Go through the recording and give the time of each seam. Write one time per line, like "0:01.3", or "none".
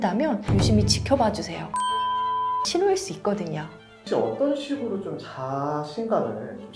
0:04.0